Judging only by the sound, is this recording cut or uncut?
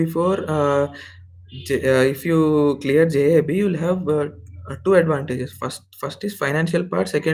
uncut